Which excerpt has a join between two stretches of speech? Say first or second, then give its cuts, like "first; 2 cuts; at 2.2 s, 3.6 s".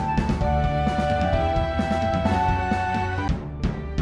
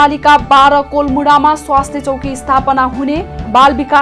first; 1 cut; at 2.8 s